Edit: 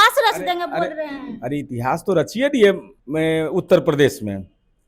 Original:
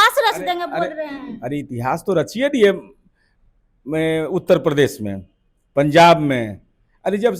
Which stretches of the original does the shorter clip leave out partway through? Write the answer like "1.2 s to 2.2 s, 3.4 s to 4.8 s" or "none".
2.9 s to 3.7 s

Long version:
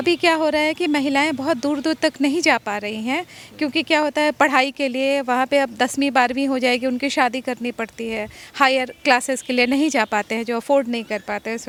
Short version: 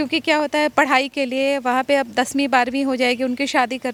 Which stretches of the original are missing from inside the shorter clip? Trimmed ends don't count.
none

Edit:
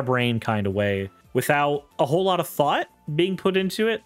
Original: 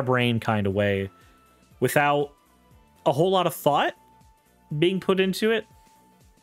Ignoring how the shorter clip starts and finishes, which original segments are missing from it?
1.2 s to 1.6 s, 2.3 s to 2.9 s, 4.0 s to 4.6 s

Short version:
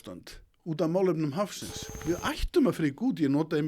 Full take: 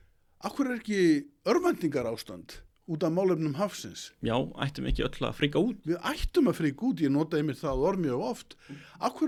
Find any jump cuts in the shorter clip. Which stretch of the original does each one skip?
4.2 s to 5.8 s

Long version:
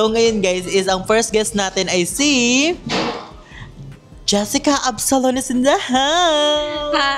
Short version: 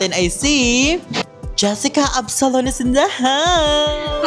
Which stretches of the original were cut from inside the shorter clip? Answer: 3.0 s to 3.9 s

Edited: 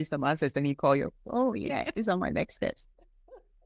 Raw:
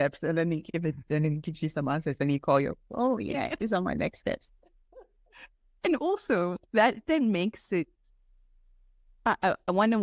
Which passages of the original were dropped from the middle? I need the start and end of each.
none

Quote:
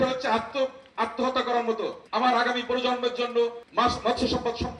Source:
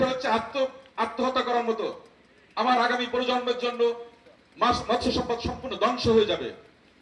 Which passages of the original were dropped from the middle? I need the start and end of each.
2.0 s to 2.4 s, 4.1 s to 4.5 s

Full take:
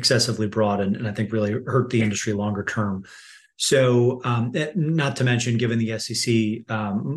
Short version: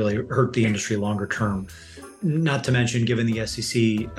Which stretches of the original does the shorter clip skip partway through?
3.5 s to 4.7 s

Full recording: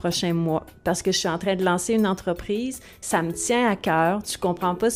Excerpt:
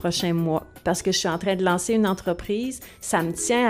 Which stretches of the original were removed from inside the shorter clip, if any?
none

